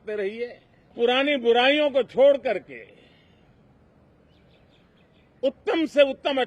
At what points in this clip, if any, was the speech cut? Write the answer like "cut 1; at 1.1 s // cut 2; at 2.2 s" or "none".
cut 1; at 0.9 s